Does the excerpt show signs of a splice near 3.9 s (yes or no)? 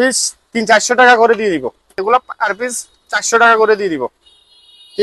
no